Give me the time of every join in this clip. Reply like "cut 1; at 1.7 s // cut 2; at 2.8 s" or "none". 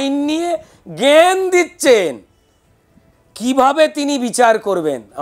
none

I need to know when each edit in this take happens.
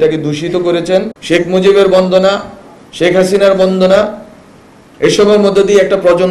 cut 1; at 1.2 s

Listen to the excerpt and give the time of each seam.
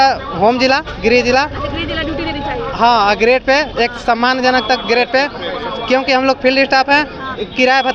none

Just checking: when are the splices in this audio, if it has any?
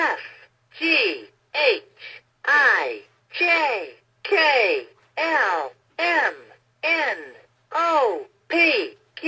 none

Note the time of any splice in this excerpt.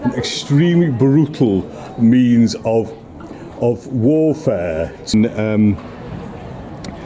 cut 1; at 5.1 s

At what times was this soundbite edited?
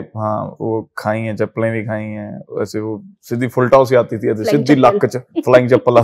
none

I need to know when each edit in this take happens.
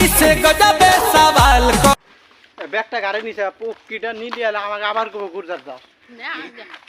cut 1; at 1.9 s

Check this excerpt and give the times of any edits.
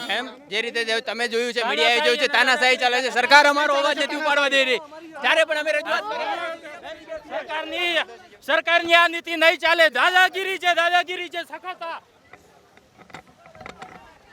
cut 1; at 12.1 s

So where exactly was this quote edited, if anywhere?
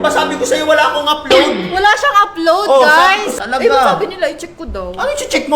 cut 1; at 3.4 s

